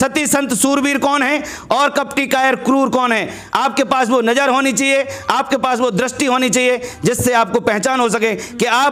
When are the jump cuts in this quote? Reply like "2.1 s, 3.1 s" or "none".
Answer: none